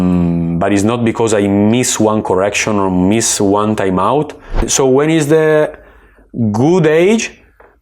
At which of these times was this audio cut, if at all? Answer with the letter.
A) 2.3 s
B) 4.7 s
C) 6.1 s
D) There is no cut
B